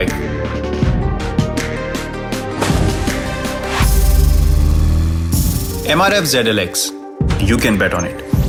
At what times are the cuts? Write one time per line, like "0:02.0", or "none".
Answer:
none